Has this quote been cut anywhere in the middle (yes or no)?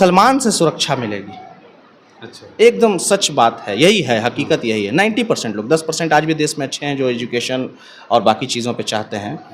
no